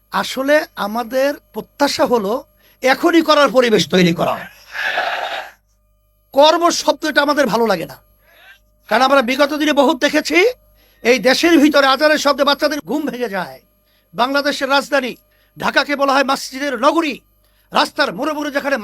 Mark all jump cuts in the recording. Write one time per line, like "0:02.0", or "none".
0:12.8